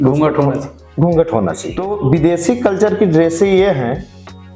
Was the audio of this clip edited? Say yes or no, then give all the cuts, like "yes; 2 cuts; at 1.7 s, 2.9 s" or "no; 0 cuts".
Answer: yes; 1 cut; at 1.9 s